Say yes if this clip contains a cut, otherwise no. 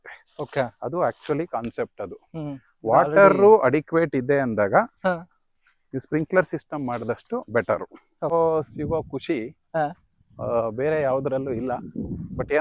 yes